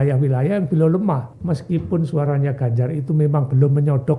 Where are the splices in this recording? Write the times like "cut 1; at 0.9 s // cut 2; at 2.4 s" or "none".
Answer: cut 1; at 1.3 s